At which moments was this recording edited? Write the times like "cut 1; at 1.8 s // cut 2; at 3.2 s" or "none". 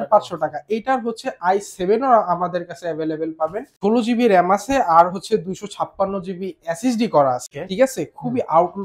cut 1; at 3.7 s // cut 2; at 7.6 s

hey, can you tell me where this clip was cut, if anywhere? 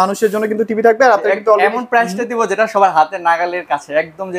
none

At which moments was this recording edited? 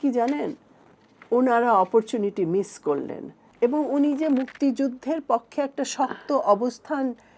cut 1; at 3.4 s

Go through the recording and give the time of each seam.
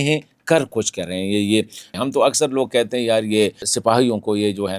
cut 1; at 1.9 s // cut 2; at 3.7 s

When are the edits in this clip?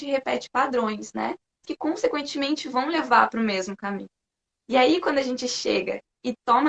cut 1; at 1.6 s

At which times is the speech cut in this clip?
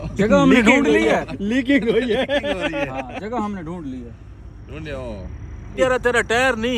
cut 1; at 5.8 s

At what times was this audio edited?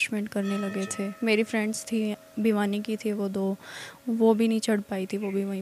none

